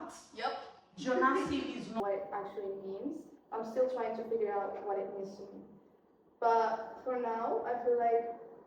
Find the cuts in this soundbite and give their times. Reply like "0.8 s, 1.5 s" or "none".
2.0 s

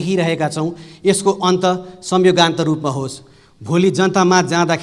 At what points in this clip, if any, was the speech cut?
none

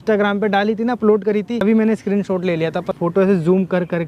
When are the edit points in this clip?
1.6 s, 2.9 s

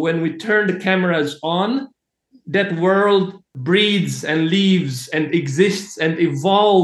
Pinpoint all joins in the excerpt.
3.4 s

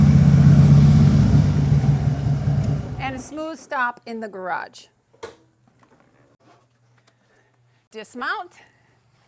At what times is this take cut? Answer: none

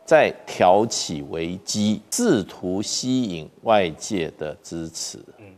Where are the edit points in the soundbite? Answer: 2.1 s

